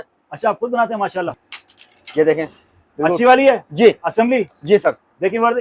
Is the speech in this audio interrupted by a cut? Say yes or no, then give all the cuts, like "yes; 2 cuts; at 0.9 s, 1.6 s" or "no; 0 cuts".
yes; 1 cut; at 1.3 s